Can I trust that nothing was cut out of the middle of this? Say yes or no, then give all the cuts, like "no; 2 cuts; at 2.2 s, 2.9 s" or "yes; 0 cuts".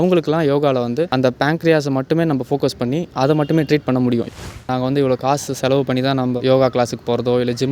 no; 2 cuts; at 4.3 s, 6.4 s